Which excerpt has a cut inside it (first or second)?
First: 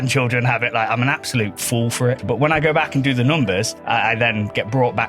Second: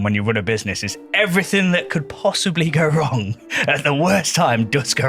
first